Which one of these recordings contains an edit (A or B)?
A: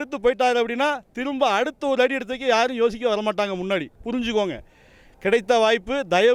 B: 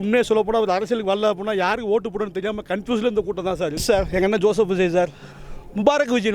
B